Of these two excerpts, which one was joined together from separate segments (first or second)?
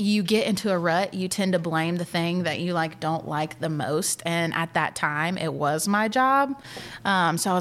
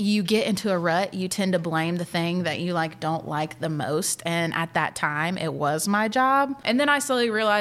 second